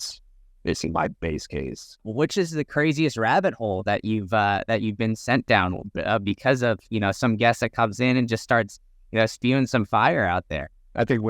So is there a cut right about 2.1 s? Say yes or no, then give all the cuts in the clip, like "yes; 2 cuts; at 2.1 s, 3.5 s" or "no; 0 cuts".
yes; 1 cut; at 2.1 s